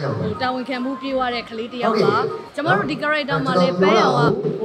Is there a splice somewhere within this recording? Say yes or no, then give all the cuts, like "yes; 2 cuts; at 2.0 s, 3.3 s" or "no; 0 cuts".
yes; 1 cut; at 2.4 s